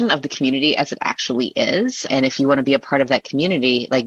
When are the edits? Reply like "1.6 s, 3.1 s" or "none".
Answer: 2.1 s